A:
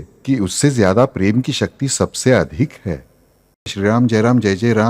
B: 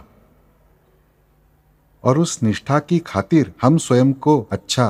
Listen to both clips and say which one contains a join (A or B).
A